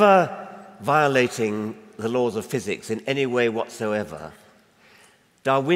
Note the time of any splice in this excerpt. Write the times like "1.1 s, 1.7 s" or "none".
none